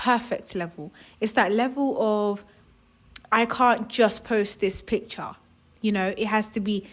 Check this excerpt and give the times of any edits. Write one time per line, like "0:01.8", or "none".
none